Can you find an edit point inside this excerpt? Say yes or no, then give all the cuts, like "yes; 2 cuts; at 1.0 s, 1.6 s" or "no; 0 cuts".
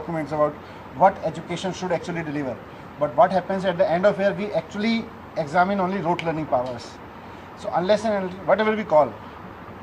no; 0 cuts